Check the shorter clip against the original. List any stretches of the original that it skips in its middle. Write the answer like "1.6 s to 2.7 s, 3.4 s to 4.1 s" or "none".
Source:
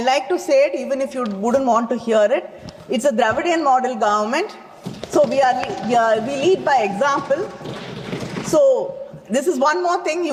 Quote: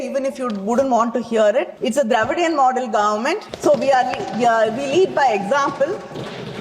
2.5 s to 2.9 s, 4.6 s to 5.0 s